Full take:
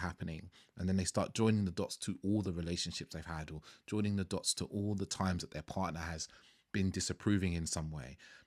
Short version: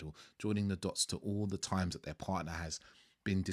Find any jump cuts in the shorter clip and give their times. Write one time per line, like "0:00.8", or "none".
none